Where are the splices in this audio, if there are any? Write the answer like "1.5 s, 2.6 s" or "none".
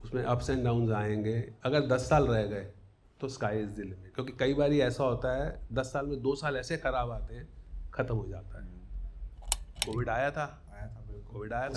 1.5 s, 4.0 s, 9.6 s

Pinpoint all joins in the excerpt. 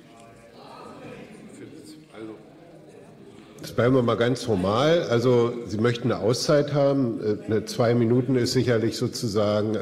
none

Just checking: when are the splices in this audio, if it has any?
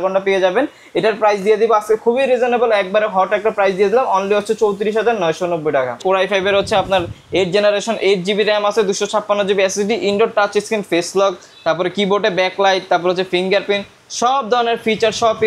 6.0 s

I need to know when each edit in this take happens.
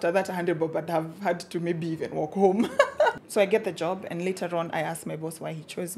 3.2 s

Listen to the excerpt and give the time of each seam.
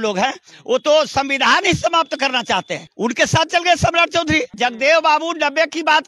2.8 s, 4.5 s

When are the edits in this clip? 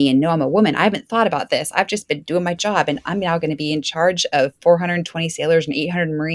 none

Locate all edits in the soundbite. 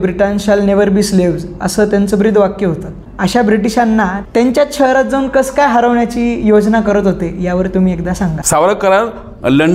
8.4 s

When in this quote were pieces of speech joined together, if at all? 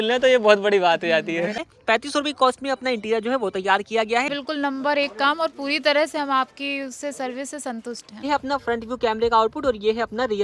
1.6 s, 4.3 s, 8.2 s

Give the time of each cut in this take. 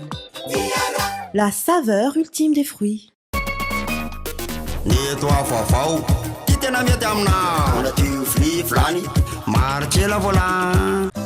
3.2 s

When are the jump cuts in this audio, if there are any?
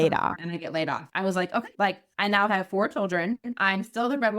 1.0 s

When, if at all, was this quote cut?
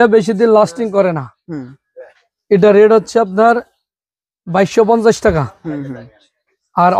none

